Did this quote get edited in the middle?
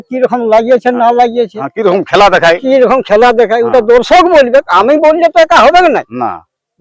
no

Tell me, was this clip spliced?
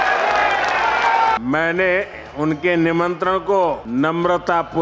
yes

